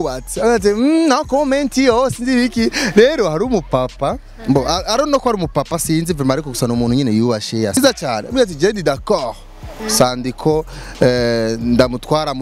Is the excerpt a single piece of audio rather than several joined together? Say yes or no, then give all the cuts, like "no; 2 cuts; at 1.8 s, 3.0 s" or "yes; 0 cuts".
yes; 0 cuts